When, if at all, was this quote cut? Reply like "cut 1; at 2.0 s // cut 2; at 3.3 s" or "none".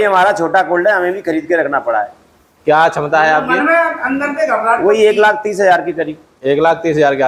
none